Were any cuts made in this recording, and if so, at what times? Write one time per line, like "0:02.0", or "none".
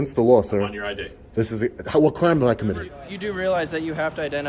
0:03.0